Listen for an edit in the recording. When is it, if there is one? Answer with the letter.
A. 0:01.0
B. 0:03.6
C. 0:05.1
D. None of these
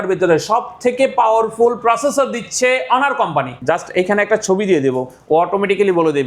B